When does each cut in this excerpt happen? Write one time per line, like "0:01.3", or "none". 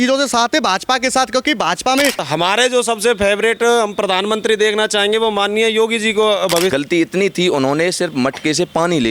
0:02.2
0:06.7